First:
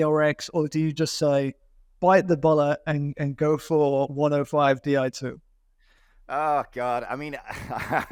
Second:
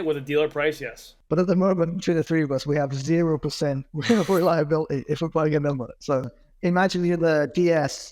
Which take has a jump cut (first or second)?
second